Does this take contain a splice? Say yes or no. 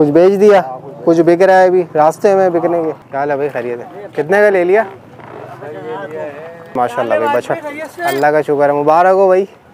yes